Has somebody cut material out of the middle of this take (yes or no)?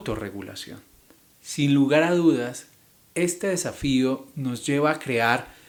no